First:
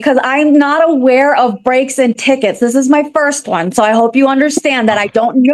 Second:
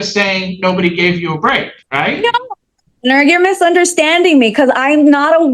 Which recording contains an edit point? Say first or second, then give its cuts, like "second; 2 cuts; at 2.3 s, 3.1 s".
second; 1 cut; at 1.8 s